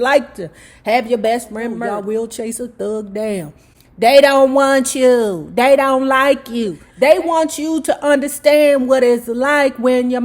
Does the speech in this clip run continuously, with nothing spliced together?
no; 1 cut; at 1.9 s

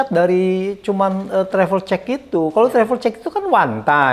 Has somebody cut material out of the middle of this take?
no; 0 cuts

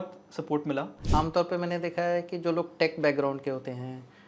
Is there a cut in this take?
yes; 1 cut; at 1.0 s

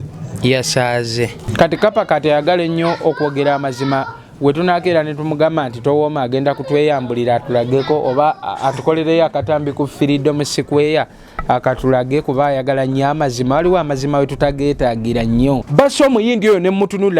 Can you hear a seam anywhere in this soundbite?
yes; 2 cuts; at 1.4 s, 15.7 s

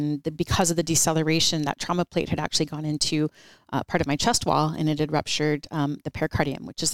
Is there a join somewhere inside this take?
no; 0 cuts

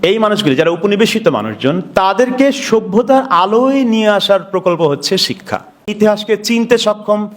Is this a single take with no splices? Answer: no; 1 cut; at 5.9 s

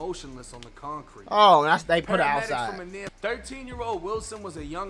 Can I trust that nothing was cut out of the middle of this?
no; 1 cut; at 3.1 s

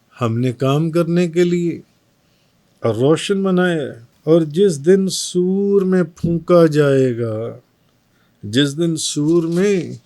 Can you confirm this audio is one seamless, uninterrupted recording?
no; 1 cut; at 4.1 s

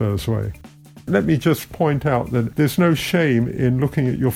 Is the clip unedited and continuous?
no; 2 cuts; at 1.1 s, 2.5 s

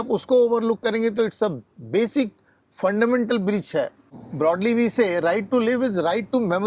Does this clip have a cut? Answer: yes; 1 cut; at 4.0 s

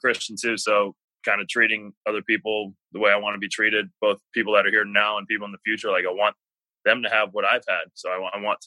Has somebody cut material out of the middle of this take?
no; 0 cuts

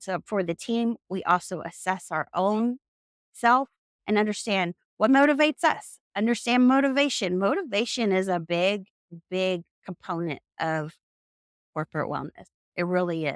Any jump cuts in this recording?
no; 0 cuts

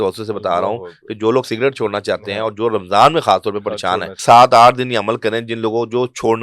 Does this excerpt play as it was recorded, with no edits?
no; 1 cut; at 4.2 s

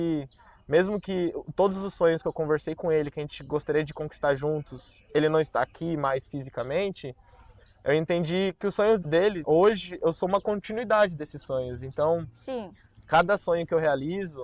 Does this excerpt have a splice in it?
yes; 1 cut; at 9.4 s

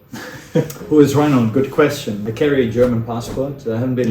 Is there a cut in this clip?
yes; 1 cut; at 2.2 s

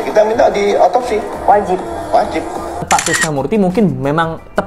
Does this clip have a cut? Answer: yes; 1 cut; at 2.8 s

